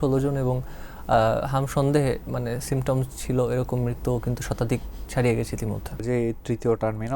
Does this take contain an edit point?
yes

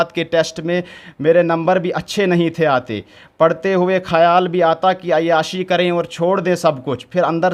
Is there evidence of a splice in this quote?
no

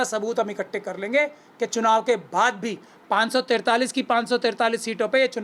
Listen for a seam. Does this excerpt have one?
no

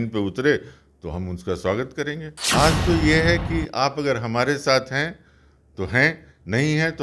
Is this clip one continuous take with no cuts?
no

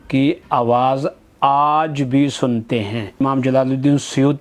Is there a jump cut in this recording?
yes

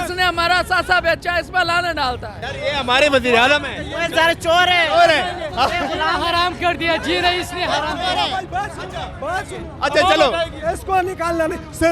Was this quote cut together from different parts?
no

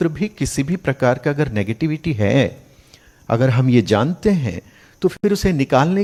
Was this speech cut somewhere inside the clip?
no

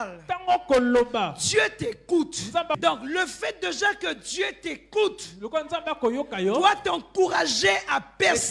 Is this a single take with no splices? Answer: no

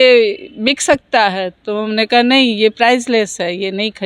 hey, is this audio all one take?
yes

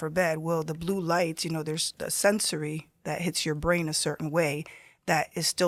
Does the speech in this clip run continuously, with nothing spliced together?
yes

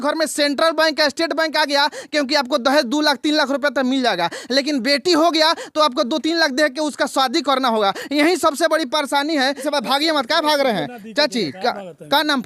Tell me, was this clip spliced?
yes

